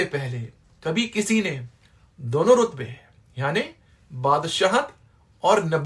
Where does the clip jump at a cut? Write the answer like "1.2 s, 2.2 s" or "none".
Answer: none

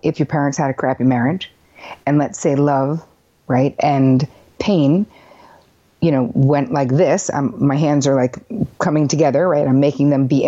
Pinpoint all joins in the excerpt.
none

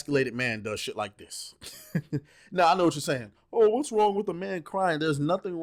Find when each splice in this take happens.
none

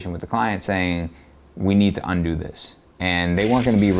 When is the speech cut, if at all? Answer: none

